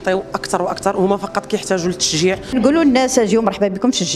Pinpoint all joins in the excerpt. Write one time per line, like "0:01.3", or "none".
0:02.5

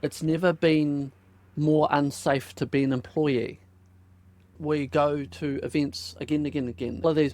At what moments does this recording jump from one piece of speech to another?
0:04.5

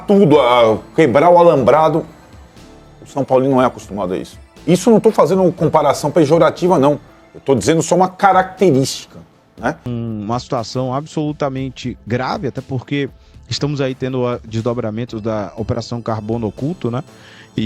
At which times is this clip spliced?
0:09.9

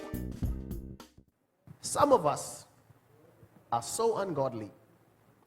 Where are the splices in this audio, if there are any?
0:01.1

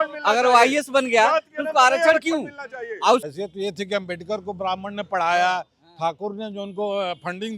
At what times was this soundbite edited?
0:03.3

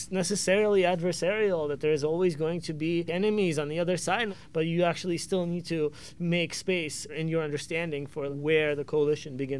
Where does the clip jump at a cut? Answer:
0:03.1
0:04.3
0:07.1
0:08.3

